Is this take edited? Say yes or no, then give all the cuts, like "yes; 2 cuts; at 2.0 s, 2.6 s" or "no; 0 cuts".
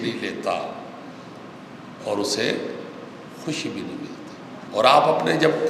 yes; 1 cut; at 4.6 s